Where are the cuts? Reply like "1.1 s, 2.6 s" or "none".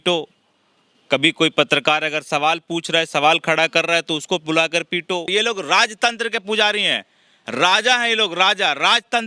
5.3 s